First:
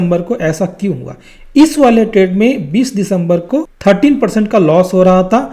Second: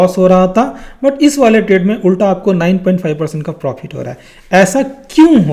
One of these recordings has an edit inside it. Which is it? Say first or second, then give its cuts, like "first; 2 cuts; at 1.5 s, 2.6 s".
first; 1 cut; at 3.7 s